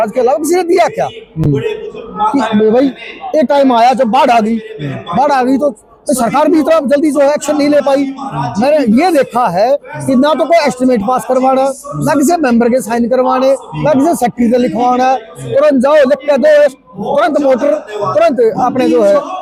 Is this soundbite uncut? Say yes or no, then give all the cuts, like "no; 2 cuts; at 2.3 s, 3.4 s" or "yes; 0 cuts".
yes; 0 cuts